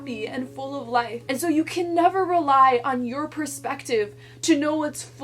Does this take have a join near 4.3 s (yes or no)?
no